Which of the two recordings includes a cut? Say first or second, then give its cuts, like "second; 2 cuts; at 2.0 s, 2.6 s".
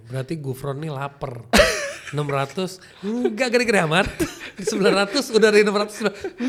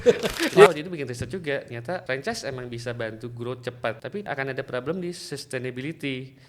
second; 3 cuts; at 0.7 s, 2.0 s, 4.3 s